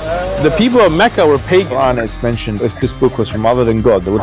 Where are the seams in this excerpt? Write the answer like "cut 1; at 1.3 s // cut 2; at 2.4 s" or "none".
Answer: cut 1; at 2.7 s